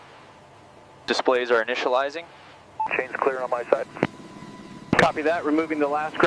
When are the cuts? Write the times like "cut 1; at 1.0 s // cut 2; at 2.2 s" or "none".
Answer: cut 1; at 2.9 s